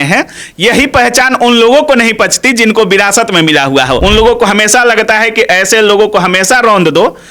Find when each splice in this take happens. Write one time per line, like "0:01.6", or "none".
0:04.0